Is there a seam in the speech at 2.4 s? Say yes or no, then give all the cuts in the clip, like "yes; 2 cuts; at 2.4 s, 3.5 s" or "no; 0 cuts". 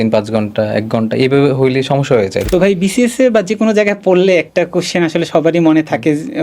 yes; 1 cut; at 2.4 s